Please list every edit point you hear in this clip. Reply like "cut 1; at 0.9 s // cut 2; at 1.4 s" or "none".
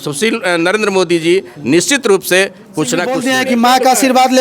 cut 1; at 3.1 s